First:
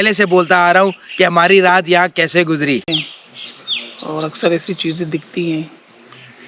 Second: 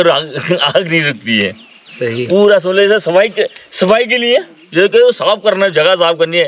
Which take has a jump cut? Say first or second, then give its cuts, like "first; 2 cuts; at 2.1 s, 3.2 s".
first; 1 cut; at 2.9 s